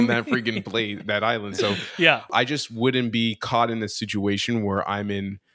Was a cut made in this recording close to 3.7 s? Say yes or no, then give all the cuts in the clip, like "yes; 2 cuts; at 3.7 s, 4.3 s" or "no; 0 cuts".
no; 1 cut; at 2.3 s